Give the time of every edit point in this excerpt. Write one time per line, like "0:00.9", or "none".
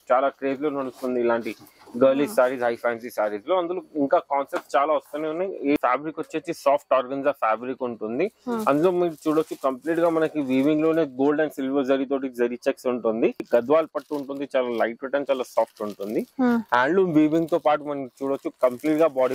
0:05.8
0:13.5